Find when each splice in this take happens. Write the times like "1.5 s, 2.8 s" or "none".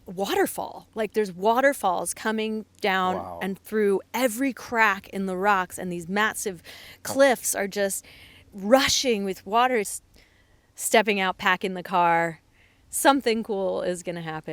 10.0 s